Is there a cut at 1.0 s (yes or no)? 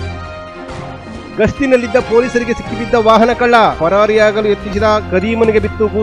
yes